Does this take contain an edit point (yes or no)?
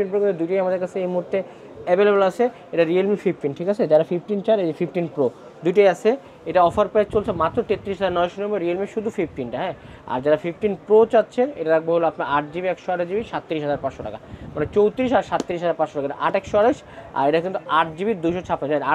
no